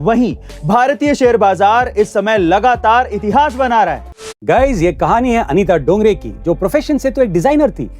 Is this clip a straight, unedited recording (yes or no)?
no